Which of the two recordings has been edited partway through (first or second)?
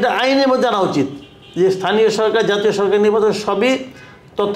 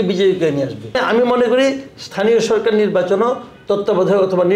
second